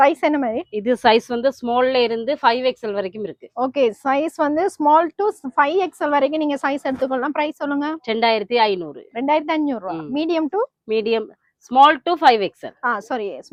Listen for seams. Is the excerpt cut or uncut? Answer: uncut